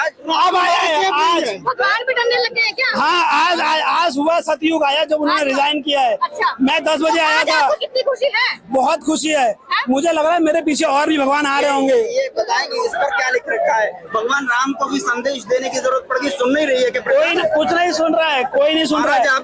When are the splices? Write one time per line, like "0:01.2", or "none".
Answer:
none